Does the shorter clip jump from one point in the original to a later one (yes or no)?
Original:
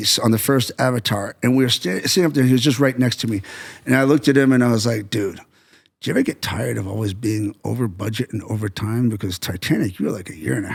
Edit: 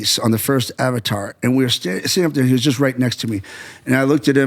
no